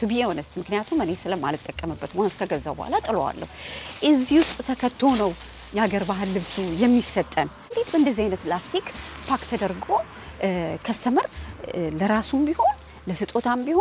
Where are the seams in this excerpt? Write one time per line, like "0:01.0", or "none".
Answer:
0:07.7

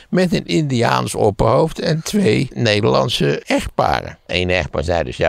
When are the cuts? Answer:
0:02.5
0:03.4
0:04.2

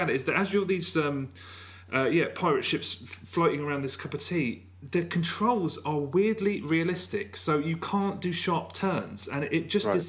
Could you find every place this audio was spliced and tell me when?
0:01.7

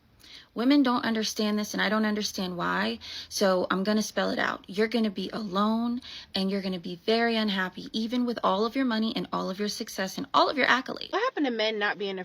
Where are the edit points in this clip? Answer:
0:11.0

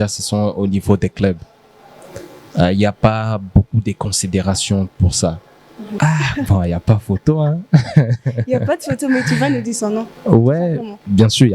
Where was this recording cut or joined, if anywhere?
0:05.9

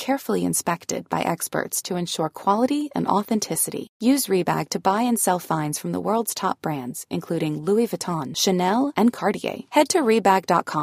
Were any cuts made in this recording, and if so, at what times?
none

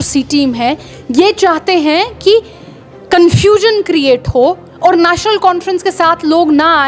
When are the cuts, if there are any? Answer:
none

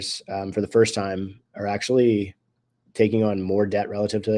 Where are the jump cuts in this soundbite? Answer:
none

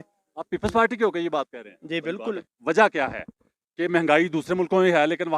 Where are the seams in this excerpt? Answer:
0:02.4

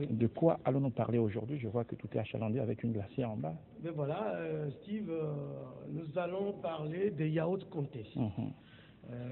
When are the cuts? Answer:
0:06.6

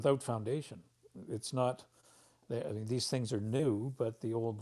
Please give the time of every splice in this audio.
0:01.1

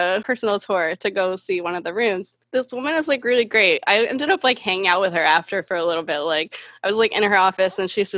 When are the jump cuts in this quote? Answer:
0:02.3

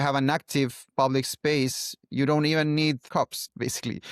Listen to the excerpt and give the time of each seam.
0:03.0

